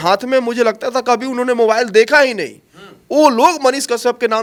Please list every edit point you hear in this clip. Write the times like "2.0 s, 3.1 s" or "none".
none